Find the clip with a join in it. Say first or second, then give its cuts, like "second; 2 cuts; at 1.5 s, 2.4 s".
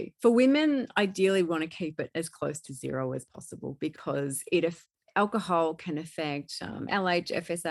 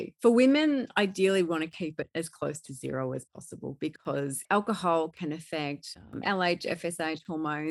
second; 1 cut; at 4.4 s